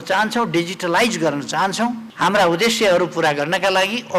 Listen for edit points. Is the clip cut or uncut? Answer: cut